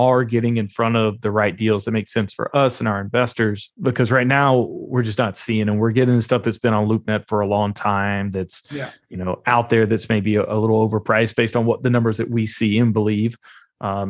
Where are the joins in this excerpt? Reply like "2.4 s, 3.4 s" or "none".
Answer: none